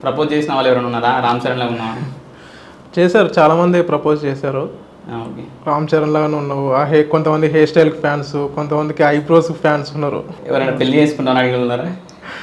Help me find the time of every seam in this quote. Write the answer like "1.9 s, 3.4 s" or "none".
10.4 s